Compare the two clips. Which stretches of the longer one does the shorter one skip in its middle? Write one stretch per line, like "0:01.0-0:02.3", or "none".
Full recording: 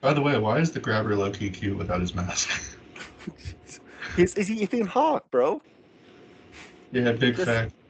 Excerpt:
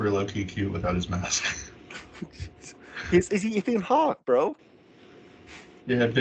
none